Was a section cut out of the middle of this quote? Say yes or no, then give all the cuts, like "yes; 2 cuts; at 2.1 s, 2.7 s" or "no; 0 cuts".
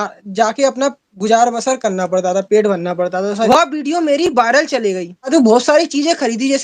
yes; 2 cuts; at 3.5 s, 5.3 s